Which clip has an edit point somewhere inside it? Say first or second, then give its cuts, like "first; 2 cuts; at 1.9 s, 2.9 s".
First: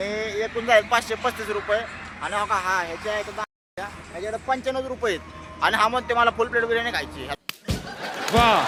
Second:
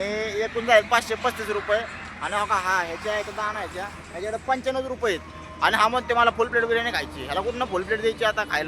second; 1 cut; at 7.3 s